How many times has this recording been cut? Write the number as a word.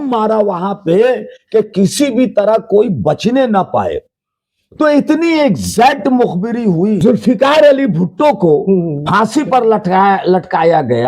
one